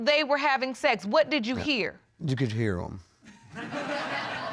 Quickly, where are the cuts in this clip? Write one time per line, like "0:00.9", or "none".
none